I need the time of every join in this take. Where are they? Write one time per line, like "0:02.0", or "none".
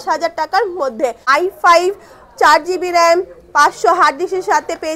0:01.2